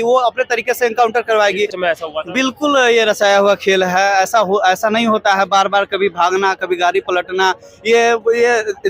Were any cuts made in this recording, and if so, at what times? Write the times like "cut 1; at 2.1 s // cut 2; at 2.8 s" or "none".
cut 1; at 1.7 s

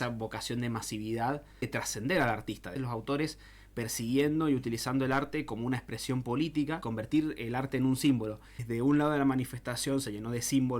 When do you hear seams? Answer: cut 1; at 1.8 s // cut 2; at 2.7 s // cut 3; at 6.9 s // cut 4; at 8.6 s

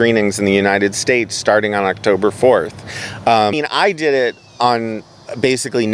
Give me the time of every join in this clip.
cut 1; at 3.5 s

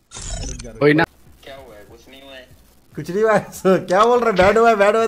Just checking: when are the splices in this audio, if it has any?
cut 1; at 1.0 s

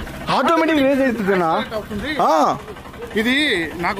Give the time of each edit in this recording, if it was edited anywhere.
none

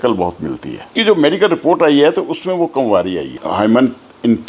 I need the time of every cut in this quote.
cut 1; at 0.9 s // cut 2; at 3.4 s

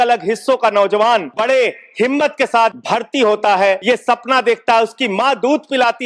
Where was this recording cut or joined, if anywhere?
cut 1; at 1.3 s // cut 2; at 2.8 s // cut 3; at 3.8 s

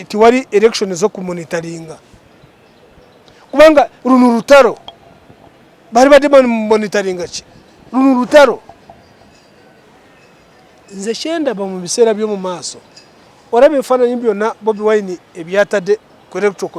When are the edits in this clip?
cut 1; at 9.8 s

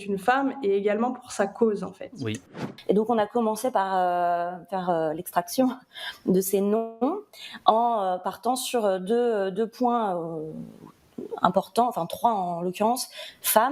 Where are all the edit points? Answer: cut 1; at 2.5 s

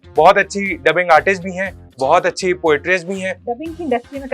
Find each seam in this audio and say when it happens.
cut 1; at 3.4 s

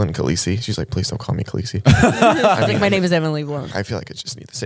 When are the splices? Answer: cut 1; at 3.7 s

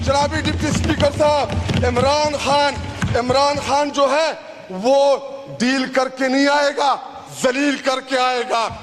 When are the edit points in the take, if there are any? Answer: none

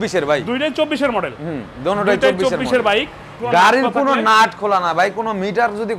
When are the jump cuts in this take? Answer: cut 1; at 3.4 s

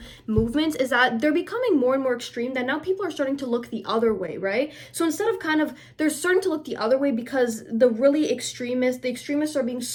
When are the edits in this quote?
none

